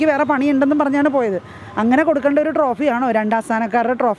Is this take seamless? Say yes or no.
yes